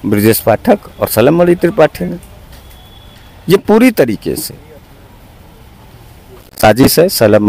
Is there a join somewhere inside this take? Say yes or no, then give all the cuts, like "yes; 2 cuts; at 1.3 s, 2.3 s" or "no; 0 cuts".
no; 0 cuts